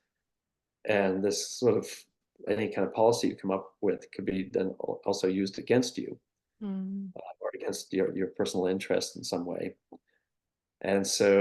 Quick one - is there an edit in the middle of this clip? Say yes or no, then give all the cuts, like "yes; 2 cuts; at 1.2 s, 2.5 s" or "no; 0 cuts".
no; 0 cuts